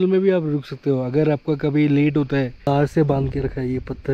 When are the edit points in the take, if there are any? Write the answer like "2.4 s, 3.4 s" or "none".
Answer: 2.6 s